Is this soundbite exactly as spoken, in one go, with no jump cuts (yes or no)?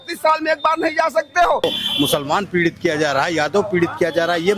no